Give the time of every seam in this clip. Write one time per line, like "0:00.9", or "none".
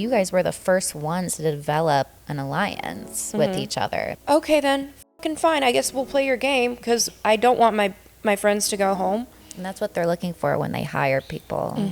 0:04.2
0:09.4